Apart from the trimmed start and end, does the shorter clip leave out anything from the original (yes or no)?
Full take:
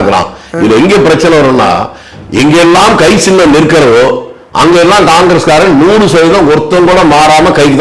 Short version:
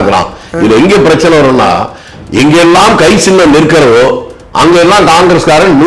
no